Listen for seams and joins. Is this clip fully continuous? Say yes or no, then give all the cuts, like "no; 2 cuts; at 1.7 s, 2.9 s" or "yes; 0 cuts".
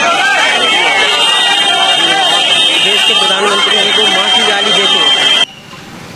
yes; 0 cuts